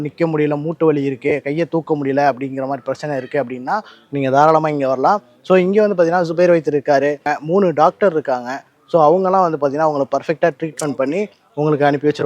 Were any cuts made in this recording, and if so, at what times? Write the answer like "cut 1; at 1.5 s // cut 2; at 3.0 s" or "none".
cut 1; at 7.3 s